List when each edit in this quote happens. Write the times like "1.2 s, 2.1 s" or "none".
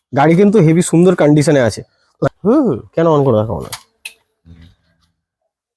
2.3 s